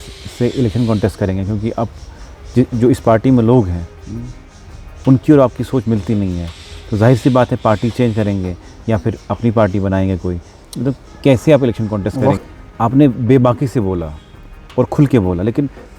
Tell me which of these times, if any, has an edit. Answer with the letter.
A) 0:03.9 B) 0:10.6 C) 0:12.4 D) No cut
C